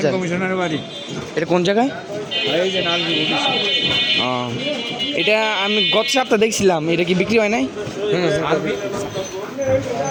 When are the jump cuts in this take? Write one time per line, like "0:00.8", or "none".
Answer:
none